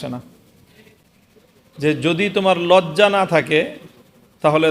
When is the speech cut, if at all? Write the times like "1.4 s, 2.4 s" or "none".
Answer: 1.1 s